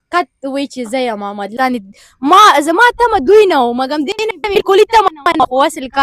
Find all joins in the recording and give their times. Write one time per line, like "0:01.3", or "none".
0:01.5